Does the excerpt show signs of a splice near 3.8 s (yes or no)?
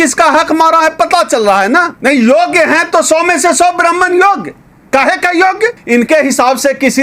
no